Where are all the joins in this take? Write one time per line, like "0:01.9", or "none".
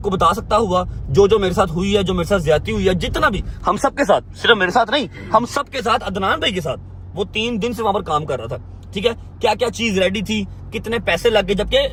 none